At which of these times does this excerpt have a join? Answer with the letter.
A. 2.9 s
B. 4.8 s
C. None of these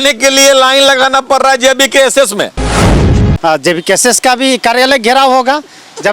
A